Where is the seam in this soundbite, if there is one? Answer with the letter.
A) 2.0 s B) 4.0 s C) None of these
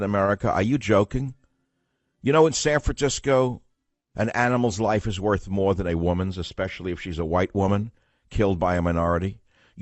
A